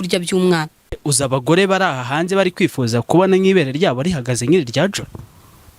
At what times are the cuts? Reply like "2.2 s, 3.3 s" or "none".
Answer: 1.0 s